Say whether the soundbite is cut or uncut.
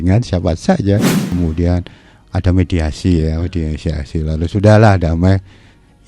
cut